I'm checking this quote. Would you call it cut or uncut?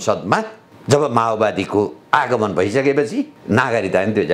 cut